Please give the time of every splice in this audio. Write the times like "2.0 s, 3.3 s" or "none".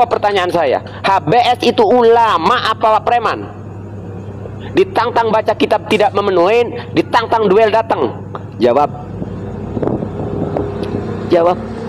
none